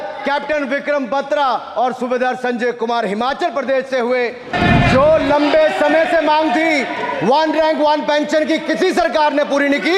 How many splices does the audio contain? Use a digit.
1